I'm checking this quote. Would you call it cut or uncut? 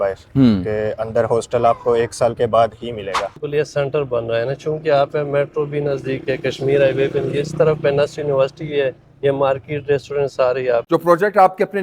cut